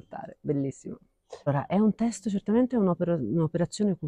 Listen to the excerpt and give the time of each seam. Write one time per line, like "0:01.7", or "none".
0:01.5